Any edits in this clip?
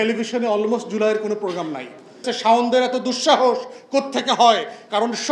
yes; 1 cut; at 2.2 s

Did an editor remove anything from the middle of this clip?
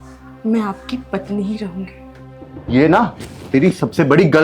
yes; 1 cut; at 2.5 s

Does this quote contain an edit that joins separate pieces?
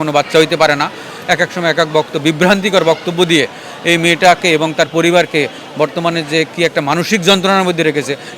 no; 0 cuts

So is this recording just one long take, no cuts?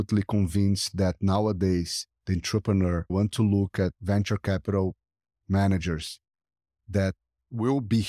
no; 2 cuts; at 3.1 s, 4.0 s

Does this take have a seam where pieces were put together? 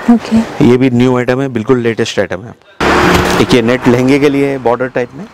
yes; 1 cut; at 2.8 s

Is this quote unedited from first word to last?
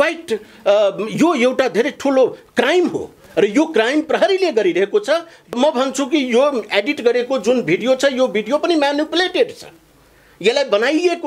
no; 1 cut; at 5.5 s

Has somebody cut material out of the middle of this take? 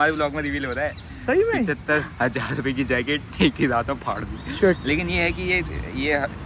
no; 0 cuts

